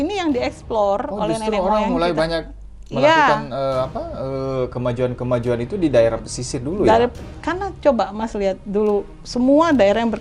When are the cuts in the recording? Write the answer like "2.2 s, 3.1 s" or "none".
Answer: none